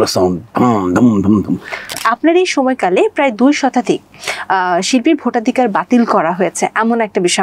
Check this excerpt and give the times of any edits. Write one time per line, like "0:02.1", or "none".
0:02.0